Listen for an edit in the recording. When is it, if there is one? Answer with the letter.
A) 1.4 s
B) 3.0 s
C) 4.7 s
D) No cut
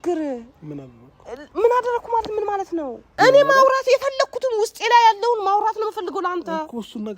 B